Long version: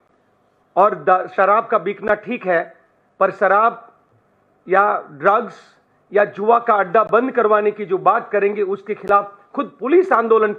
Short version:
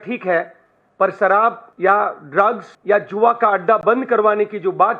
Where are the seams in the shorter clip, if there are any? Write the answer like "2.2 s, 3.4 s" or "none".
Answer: 1.7 s, 2.7 s